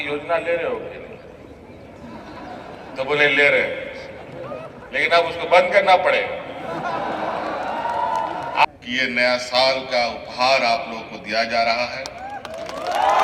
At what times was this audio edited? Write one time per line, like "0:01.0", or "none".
0:08.6

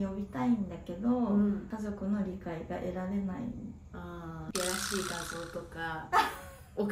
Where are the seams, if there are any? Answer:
0:04.4

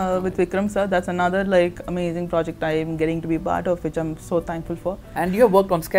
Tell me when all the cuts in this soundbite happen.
0:05.1

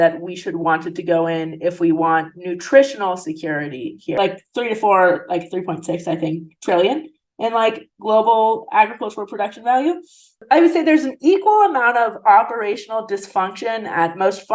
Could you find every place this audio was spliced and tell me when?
0:04.1
0:10.4

